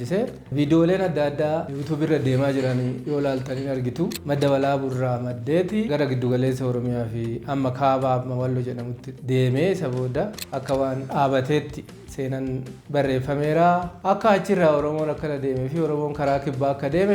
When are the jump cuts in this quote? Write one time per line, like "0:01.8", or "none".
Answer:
0:01.7
0:04.2
0:13.9